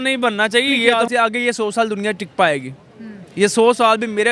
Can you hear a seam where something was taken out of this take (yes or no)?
yes